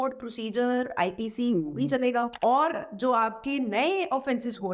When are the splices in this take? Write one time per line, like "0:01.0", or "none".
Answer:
0:02.3